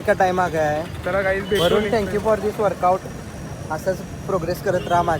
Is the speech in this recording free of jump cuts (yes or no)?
yes